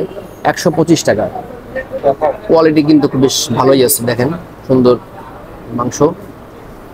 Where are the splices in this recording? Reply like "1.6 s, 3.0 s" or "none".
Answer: 2.0 s